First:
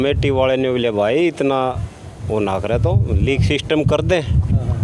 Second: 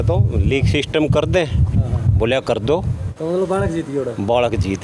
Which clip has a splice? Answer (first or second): second